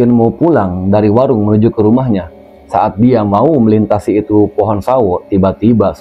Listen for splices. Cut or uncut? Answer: uncut